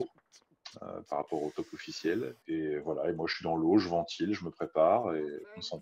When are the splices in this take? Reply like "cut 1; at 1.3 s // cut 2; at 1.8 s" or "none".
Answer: cut 1; at 2.4 s